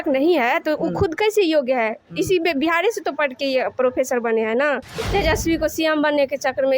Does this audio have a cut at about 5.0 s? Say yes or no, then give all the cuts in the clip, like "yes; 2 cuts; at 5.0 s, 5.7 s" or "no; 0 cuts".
yes; 1 cut; at 5.0 s